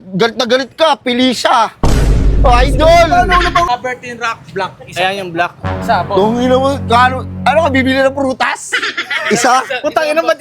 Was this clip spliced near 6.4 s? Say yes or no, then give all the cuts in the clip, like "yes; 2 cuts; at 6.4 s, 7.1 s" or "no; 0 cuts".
no; 1 cut; at 3.7 s